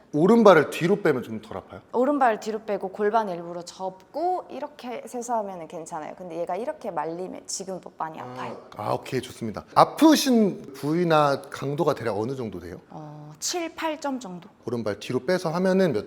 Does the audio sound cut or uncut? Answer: uncut